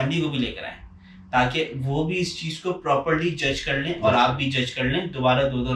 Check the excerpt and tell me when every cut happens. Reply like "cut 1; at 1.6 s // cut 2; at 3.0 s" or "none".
none